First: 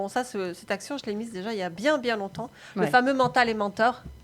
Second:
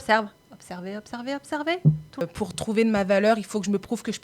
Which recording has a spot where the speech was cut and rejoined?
second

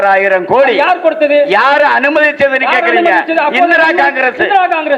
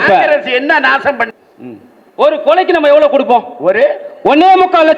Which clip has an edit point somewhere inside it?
second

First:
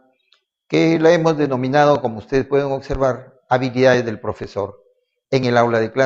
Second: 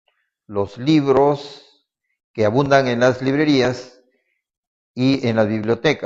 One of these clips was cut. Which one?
first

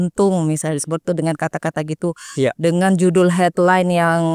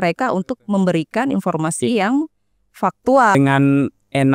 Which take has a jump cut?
second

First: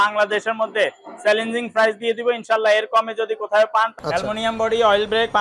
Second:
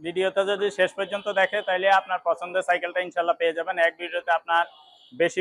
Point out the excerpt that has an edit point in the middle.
first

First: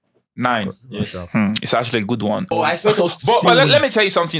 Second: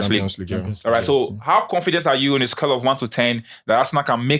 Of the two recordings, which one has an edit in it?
first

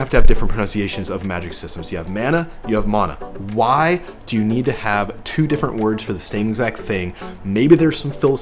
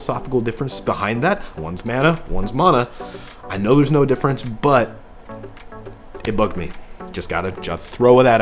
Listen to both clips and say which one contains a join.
second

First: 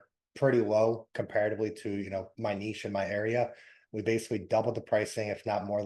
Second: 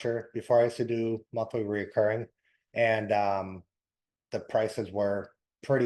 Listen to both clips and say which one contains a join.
first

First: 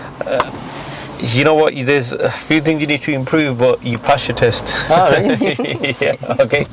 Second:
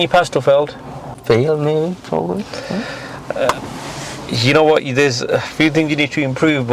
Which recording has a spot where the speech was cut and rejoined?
second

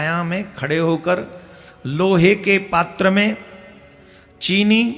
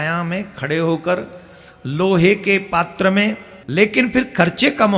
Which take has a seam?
second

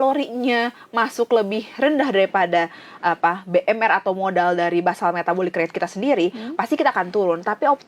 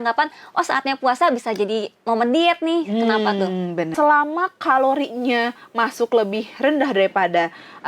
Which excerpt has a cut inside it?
second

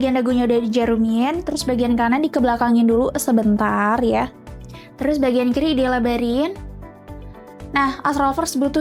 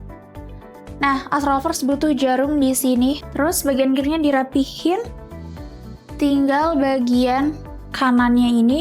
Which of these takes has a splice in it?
second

